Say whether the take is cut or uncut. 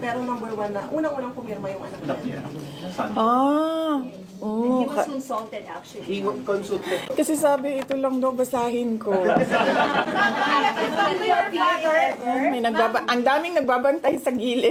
uncut